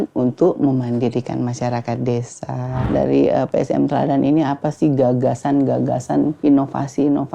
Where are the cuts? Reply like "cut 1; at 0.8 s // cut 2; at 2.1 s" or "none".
cut 1; at 2.8 s // cut 2; at 6.4 s